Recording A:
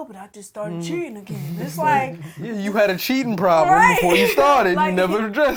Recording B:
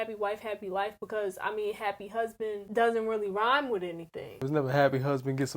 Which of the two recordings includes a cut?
B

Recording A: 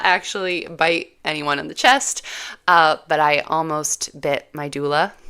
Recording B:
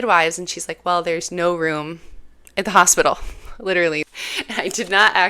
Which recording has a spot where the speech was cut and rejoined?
B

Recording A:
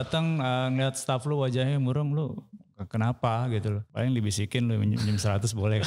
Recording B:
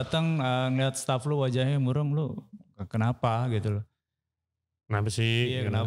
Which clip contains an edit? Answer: A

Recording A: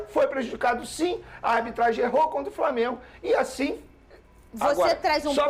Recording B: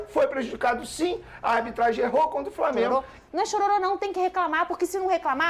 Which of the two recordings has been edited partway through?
B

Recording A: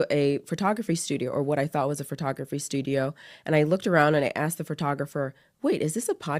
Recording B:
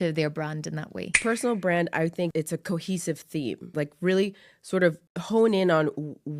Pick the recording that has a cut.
B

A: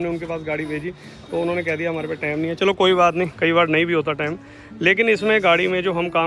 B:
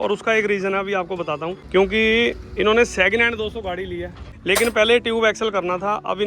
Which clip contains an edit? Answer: B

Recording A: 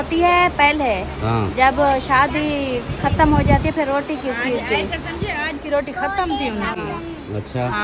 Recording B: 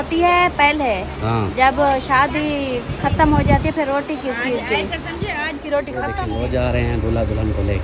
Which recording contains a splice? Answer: B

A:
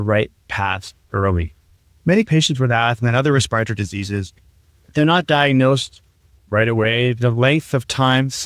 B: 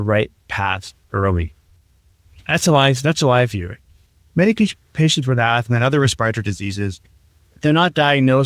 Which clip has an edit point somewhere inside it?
A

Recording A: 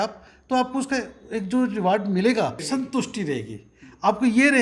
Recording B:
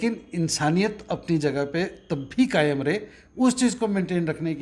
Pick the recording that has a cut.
A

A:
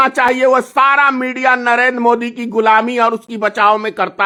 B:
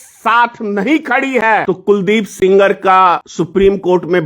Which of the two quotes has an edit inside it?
B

